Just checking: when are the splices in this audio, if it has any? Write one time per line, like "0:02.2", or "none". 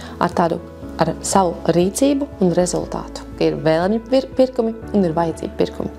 0:03.3

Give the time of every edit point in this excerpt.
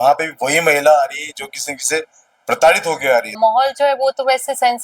0:03.4

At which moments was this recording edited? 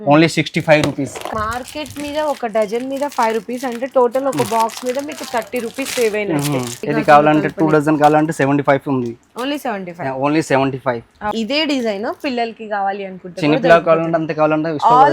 0:01.3
0:06.8
0:11.3

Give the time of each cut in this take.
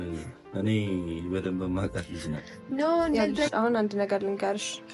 0:03.3

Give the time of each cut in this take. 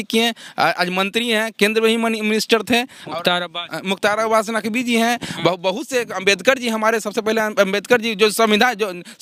none

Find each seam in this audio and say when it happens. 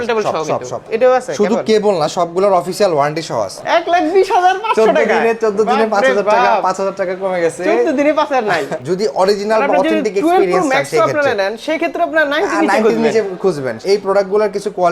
0:00.9
0:03.5
0:08.8
0:13.7

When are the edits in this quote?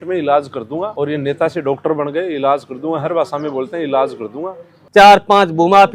0:04.8

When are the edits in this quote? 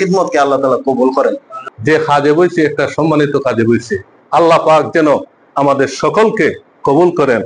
0:01.5

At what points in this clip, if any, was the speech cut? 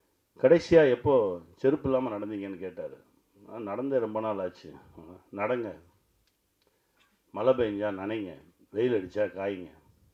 none

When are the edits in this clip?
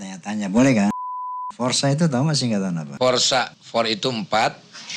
0:01.0
0:02.9
0:03.6

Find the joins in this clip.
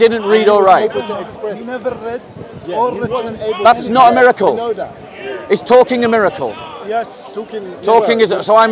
none

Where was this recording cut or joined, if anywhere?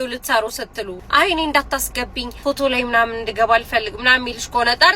0:01.0
0:02.2

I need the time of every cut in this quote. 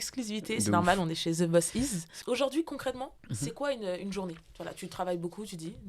0:02.1

